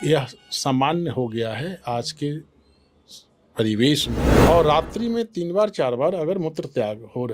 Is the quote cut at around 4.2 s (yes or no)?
yes